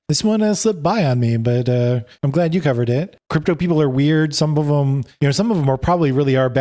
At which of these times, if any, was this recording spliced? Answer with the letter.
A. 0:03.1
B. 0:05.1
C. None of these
A